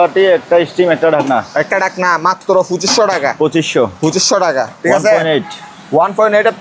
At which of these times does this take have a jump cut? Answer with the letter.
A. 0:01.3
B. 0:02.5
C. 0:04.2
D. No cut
D